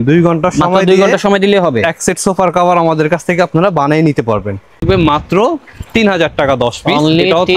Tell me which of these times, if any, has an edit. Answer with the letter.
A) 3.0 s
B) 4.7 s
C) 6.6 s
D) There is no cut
B